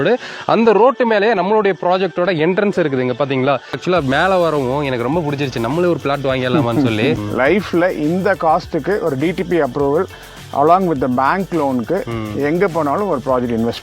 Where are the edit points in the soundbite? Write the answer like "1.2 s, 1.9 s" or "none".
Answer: 3.8 s, 7.2 s